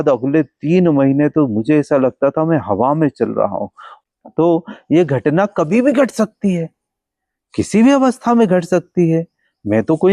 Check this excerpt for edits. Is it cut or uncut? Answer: uncut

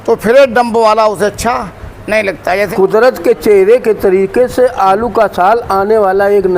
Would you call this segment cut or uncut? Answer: cut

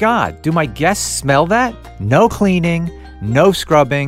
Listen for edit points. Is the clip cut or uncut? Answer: cut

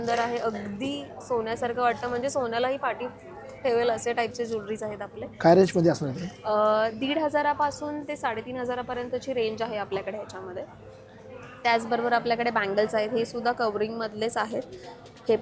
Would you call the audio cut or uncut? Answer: uncut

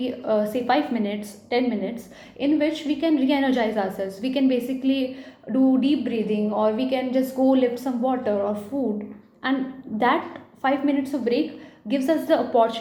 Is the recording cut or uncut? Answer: uncut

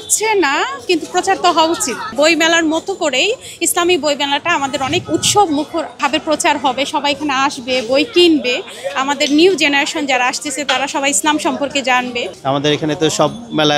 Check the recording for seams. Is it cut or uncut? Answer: cut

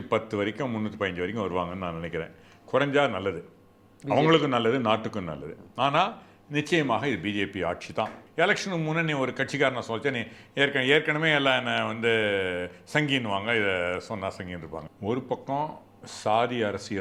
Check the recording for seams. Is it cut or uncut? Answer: cut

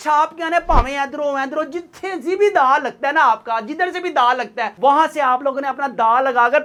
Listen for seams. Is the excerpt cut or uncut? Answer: uncut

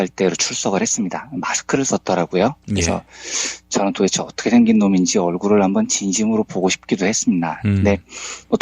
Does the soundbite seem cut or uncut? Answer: cut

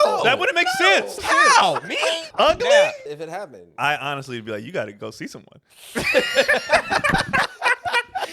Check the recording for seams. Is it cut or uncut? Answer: cut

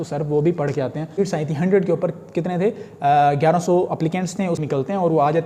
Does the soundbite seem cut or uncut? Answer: cut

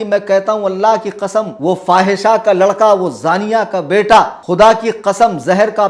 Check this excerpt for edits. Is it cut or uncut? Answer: cut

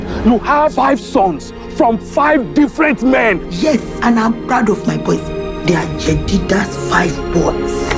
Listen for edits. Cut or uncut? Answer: uncut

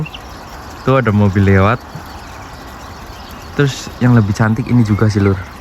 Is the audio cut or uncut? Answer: uncut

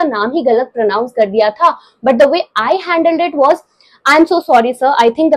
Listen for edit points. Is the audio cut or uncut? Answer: uncut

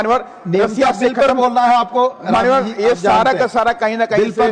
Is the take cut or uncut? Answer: uncut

